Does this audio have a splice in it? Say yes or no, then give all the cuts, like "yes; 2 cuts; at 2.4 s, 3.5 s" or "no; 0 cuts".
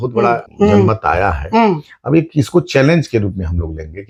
no; 0 cuts